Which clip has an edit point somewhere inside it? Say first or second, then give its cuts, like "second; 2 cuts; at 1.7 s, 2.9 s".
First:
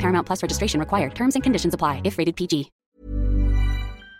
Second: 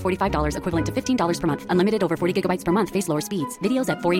first; 1 cut; at 2.8 s